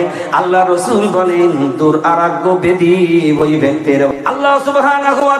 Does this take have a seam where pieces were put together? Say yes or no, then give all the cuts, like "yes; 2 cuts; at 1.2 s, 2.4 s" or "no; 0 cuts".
yes; 1 cut; at 4.1 s